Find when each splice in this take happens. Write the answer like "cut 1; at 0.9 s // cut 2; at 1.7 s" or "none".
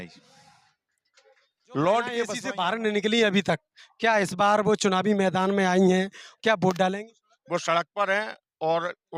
cut 1; at 2.3 s